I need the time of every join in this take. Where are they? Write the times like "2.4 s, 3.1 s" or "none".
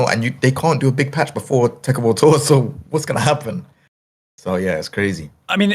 none